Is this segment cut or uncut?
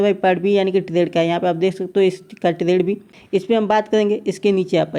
uncut